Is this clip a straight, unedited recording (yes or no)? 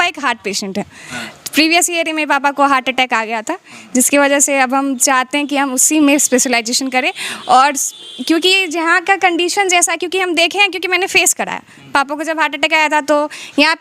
yes